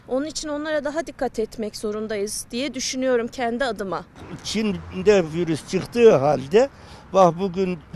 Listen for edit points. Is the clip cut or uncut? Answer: cut